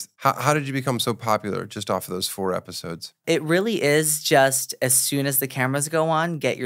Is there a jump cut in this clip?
no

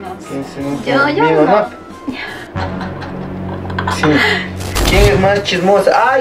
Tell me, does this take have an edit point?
yes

